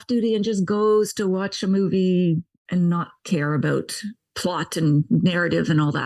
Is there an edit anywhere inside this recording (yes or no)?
no